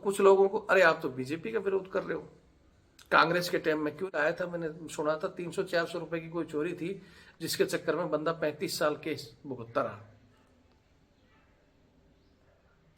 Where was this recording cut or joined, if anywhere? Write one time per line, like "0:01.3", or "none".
0:04.1